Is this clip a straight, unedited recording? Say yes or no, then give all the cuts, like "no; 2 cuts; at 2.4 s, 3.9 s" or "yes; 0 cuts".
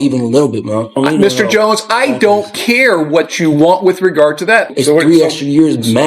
no; 2 cuts; at 1.0 s, 4.7 s